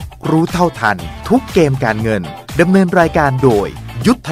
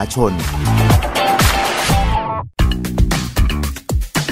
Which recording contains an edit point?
second; 1 cut; at 2.5 s

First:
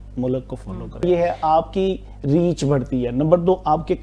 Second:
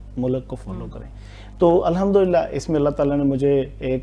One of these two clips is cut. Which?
first; 1 cut; at 1.1 s

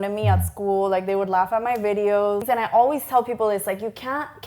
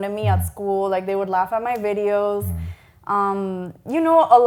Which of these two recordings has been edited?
first; 1 cut; at 2.4 s

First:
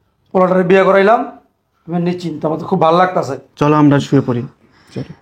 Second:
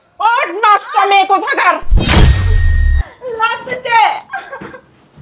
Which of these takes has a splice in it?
first; 1 cut; at 3.4 s

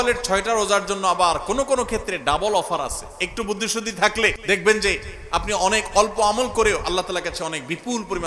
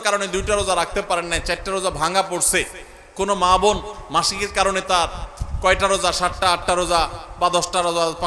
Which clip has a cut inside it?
first; 1 cut; at 4.4 s

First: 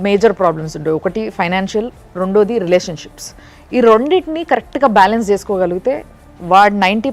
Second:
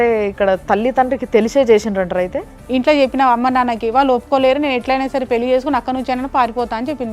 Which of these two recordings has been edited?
second; 1 cut; at 2.5 s

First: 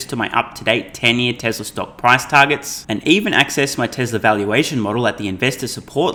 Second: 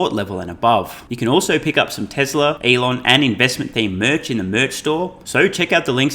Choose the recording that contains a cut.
second; 3 cuts; at 1.0 s, 2.6 s, 5.2 s

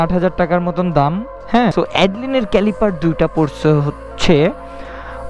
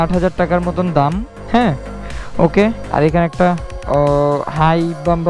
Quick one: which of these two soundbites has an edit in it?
first; 1 cut; at 1.7 s

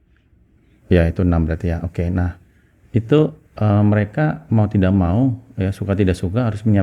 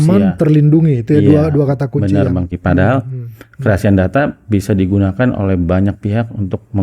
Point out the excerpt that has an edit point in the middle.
second; 1 cut; at 2.5 s

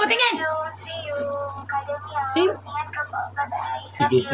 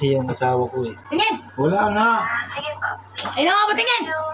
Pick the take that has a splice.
second; 1 cut; at 1.0 s

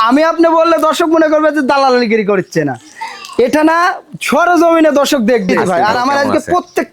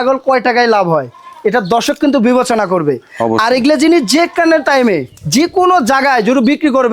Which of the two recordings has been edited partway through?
first; 1 cut; at 5.6 s

